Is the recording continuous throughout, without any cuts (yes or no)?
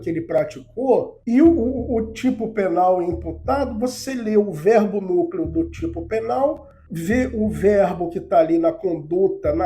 no